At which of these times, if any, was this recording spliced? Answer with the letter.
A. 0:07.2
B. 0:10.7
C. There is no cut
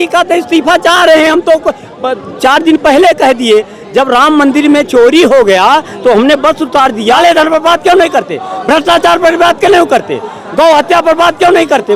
A